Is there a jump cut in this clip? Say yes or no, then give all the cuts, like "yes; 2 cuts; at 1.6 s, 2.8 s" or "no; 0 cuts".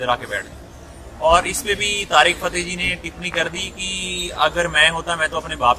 yes; 1 cut; at 2.1 s